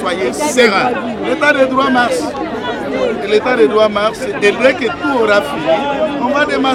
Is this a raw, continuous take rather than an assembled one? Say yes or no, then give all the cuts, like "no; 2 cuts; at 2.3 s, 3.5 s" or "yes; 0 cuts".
yes; 0 cuts